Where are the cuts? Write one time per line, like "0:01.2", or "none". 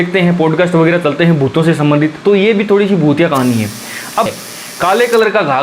0:04.3